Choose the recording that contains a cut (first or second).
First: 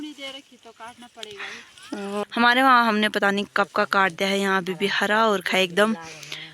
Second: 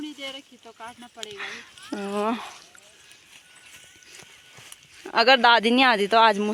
first